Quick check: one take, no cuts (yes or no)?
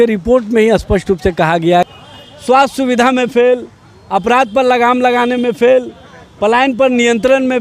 no